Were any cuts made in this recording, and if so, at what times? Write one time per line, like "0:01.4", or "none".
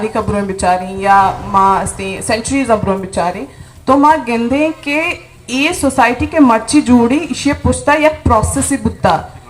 none